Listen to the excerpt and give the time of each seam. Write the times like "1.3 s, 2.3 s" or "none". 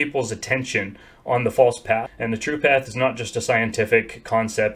2.1 s